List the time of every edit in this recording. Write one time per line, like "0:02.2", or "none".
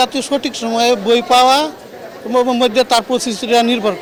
none